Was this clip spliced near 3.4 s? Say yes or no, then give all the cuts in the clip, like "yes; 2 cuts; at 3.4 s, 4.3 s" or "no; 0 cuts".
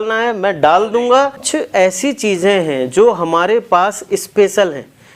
no; 1 cut; at 1.5 s